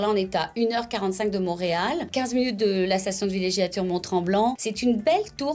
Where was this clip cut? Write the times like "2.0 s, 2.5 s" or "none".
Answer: 2.1 s, 4.7 s